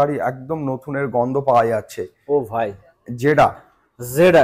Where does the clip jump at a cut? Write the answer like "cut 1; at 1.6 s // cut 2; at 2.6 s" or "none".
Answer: none